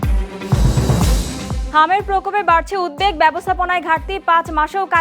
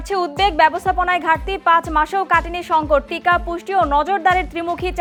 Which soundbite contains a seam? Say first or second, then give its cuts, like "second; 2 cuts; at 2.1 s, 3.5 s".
first; 1 cut; at 1.6 s